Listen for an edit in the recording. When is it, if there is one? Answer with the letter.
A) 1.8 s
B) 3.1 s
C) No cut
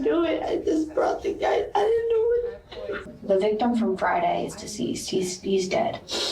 B